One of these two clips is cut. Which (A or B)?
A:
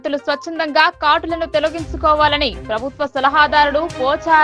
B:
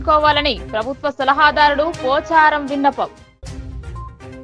B